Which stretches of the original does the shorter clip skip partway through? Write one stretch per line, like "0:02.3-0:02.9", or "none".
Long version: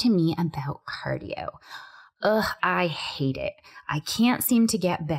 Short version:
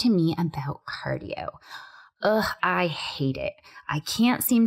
none